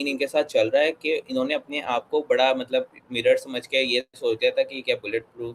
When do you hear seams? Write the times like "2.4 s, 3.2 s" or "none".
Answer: none